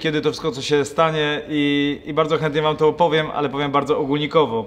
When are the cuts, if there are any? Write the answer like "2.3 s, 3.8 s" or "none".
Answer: none